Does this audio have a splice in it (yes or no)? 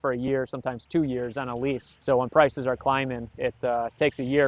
yes